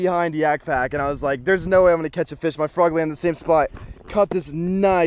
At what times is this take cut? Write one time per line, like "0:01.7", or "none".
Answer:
none

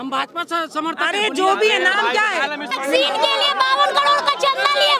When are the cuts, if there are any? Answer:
0:02.8

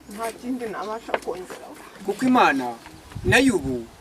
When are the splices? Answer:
0:01.8

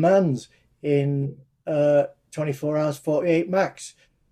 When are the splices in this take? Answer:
none

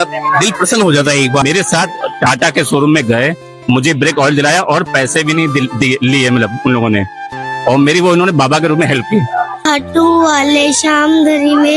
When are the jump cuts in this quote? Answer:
0:01.4
0:09.6

